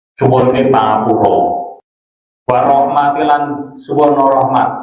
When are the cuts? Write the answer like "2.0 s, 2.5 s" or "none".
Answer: 1.7 s